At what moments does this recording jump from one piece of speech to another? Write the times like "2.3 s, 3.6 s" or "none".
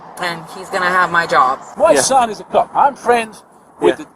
1.7 s